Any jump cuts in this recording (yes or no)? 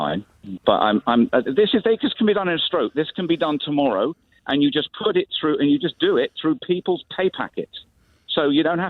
yes